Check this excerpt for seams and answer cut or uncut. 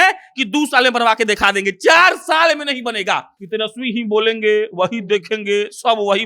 cut